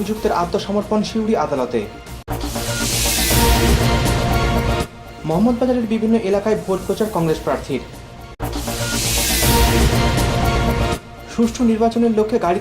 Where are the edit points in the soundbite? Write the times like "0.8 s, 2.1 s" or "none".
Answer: 2.1 s, 4.8 s